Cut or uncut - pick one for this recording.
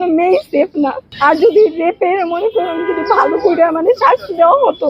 cut